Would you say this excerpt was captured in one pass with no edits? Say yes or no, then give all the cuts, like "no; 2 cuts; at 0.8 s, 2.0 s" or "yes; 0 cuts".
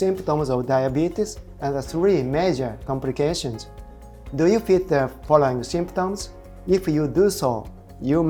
yes; 0 cuts